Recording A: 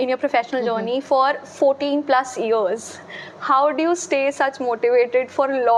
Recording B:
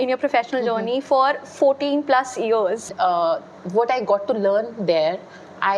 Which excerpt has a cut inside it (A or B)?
B